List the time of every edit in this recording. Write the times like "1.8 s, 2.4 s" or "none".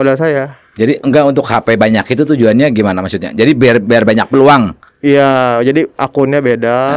none